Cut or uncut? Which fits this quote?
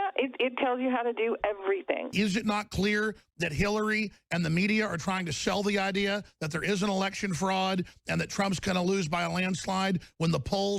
cut